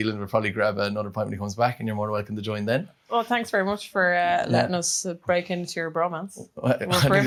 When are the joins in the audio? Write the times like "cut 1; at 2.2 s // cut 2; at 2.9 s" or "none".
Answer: none